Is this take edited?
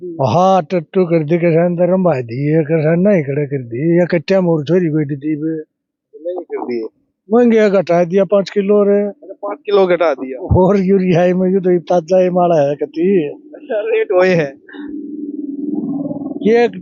no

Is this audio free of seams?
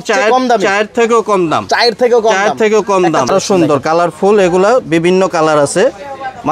no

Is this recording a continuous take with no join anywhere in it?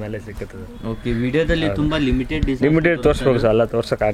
yes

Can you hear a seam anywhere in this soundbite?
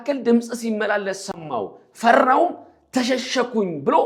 no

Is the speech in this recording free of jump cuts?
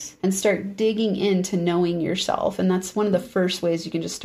yes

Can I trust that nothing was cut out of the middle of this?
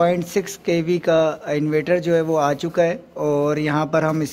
yes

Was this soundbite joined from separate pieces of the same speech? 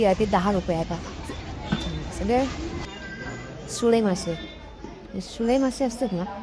yes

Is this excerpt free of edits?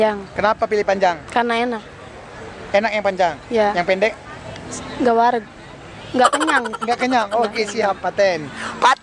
yes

